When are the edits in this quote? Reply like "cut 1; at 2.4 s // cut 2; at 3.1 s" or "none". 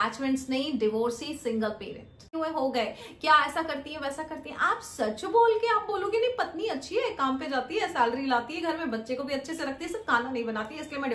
cut 1; at 2.3 s